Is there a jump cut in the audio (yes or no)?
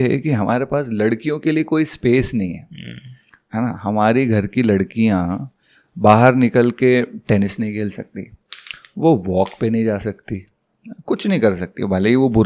no